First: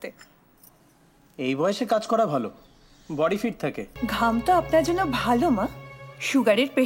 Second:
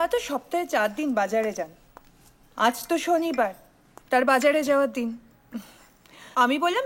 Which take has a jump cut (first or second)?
first